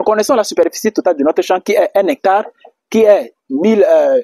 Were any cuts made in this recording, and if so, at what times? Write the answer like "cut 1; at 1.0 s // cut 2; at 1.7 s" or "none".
none